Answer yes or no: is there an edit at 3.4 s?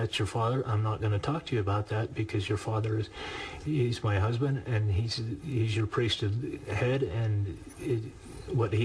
no